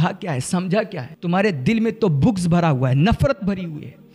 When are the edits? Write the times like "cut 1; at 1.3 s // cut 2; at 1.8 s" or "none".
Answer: cut 1; at 1.1 s